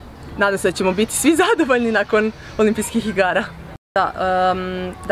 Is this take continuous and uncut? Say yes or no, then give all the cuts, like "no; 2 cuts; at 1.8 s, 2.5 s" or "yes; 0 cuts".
no; 1 cut; at 3.8 s